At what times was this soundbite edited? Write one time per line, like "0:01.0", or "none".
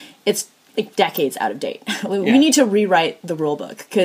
none